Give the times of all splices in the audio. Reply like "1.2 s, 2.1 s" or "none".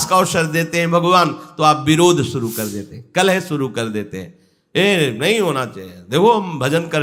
none